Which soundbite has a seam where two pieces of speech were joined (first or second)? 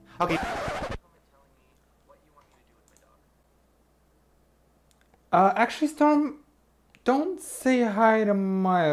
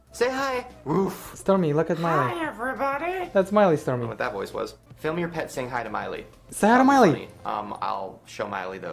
second